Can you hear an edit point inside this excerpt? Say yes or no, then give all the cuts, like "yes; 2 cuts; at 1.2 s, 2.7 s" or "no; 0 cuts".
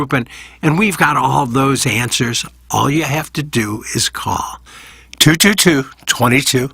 no; 0 cuts